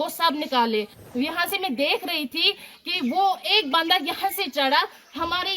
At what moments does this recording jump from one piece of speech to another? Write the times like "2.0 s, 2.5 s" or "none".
1.0 s